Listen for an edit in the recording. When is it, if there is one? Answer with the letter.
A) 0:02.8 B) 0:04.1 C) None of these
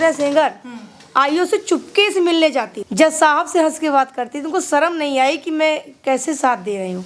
A